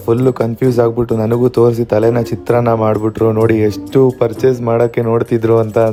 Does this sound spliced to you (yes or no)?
no